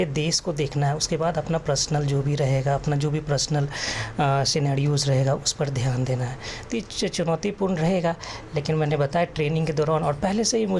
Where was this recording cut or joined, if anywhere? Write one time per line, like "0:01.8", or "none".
none